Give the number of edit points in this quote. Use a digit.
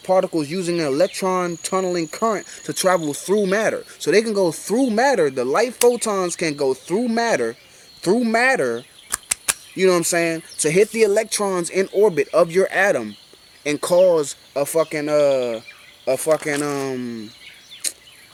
0